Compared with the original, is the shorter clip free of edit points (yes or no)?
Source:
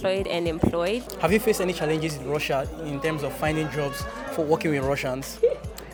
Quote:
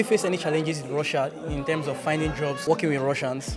no